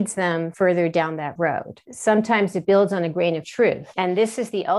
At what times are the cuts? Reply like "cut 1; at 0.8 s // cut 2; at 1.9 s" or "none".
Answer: cut 1; at 1.9 s // cut 2; at 3.9 s